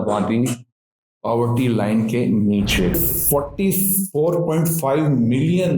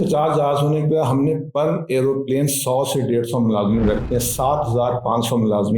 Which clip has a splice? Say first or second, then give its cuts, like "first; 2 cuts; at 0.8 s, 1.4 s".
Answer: first; 1 cut; at 2.9 s